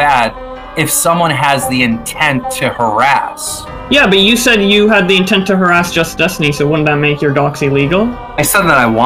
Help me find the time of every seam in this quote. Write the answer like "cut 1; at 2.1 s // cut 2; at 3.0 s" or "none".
none